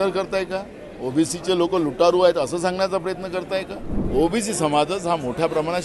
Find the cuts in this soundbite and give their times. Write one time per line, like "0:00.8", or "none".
0:03.9